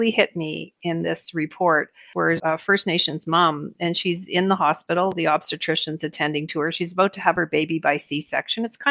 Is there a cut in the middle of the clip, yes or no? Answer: yes